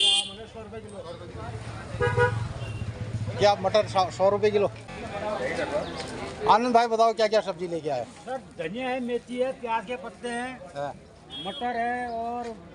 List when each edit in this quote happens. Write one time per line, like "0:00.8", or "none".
0:04.9